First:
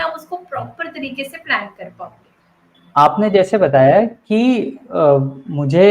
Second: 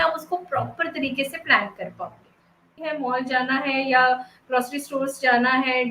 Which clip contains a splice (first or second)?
second